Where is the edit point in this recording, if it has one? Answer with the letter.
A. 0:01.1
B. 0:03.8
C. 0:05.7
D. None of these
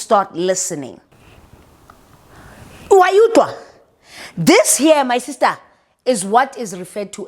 A